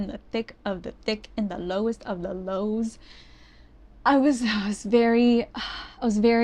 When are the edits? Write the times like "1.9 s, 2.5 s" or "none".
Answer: none